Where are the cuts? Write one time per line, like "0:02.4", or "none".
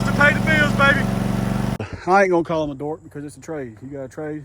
0:01.9